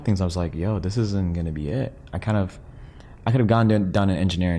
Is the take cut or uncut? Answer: uncut